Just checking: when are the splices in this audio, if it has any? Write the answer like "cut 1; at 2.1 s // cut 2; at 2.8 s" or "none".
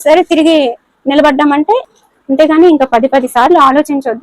cut 1; at 1.9 s

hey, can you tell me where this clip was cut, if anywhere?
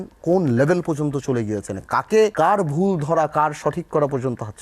cut 1; at 2.3 s

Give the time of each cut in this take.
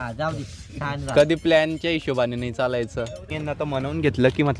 cut 1; at 3.3 s

